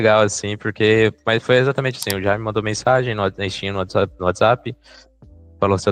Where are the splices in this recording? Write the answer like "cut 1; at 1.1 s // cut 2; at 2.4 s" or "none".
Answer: none